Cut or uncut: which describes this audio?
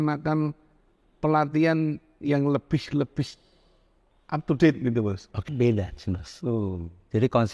cut